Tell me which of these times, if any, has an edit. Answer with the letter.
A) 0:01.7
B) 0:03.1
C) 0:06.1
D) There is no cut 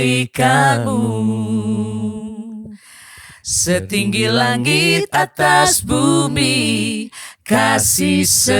D